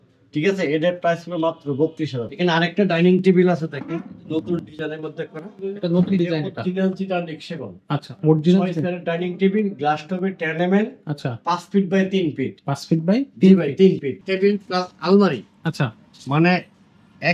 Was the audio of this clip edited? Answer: yes; 2 cuts; at 2.3 s, 14.2 s

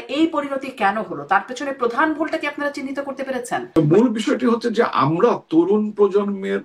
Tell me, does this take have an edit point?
yes; 1 cut; at 3.8 s

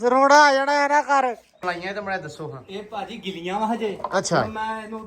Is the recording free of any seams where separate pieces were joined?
no; 1 cut; at 1.6 s

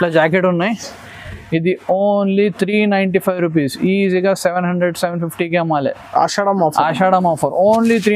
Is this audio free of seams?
yes; 0 cuts

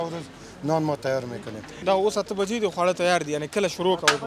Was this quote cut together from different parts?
yes; 1 cut; at 1.7 s

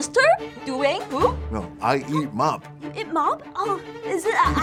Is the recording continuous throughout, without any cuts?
yes; 0 cuts

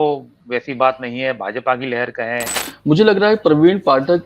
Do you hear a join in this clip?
yes; 1 cut; at 2.6 s

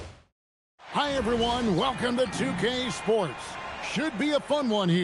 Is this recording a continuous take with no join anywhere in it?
no; 1 cut; at 1.0 s

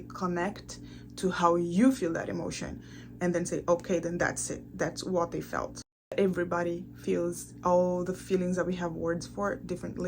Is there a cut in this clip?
yes; 1 cut; at 6.1 s

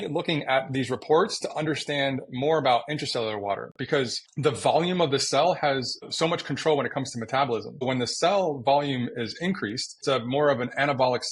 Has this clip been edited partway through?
yes; 4 cuts; at 4.2 s, 6.1 s, 7.8 s, 9.9 s

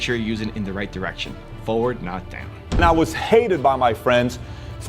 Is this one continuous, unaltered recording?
no; 1 cut; at 2.8 s

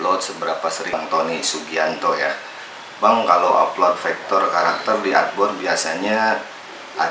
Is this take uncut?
no; 1 cut; at 0.9 s

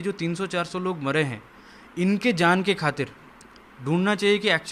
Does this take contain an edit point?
no; 0 cuts

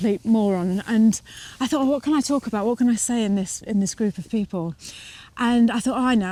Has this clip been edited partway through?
no; 0 cuts

